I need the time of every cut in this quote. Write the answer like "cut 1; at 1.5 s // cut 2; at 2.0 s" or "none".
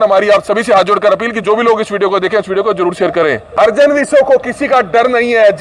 cut 1; at 3.7 s

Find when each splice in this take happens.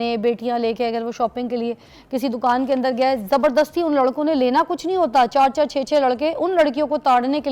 none

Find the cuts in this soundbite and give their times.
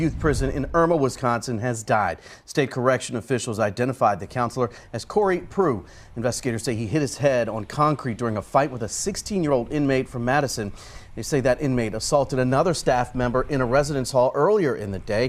none

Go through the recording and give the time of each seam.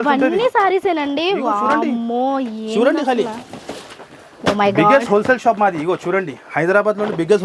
none

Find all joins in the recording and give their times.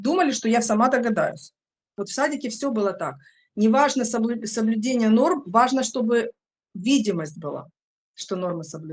cut 1; at 2.0 s

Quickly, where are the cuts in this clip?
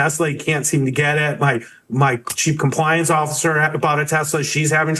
none

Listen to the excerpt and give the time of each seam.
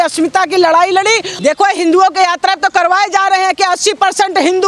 cut 1; at 1.3 s

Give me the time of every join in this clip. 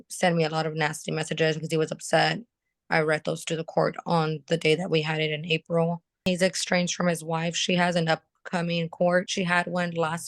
cut 1; at 6.3 s // cut 2; at 9.3 s

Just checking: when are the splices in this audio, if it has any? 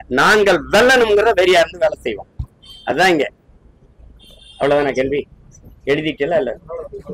none

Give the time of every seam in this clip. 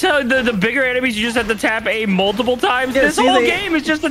none

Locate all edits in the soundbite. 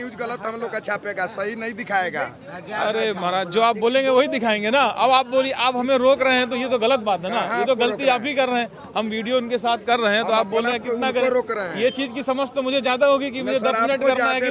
none

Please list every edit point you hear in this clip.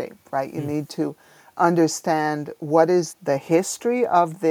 cut 1; at 3.1 s

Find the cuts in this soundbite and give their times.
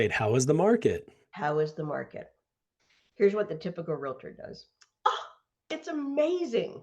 none

